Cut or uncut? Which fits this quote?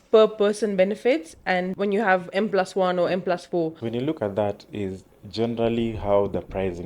cut